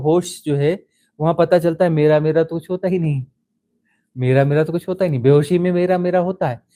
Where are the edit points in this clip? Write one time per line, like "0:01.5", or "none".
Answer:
none